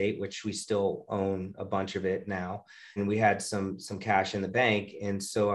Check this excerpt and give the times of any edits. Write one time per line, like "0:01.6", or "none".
0:02.9